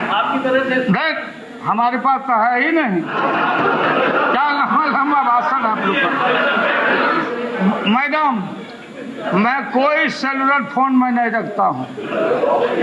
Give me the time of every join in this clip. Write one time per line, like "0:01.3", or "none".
0:03.1
0:07.3